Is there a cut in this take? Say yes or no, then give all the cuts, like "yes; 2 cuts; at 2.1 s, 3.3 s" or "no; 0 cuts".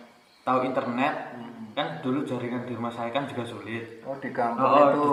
no; 0 cuts